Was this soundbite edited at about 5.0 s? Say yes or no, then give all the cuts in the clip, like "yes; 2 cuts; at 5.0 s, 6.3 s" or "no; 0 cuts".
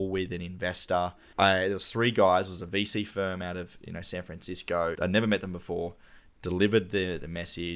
yes; 2 cuts; at 1.2 s, 5.0 s